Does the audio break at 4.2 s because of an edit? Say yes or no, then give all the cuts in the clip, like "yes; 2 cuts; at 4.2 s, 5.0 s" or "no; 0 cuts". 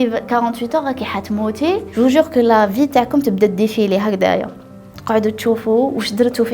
no; 1 cut; at 1.9 s